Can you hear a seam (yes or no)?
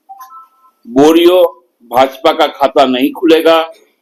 no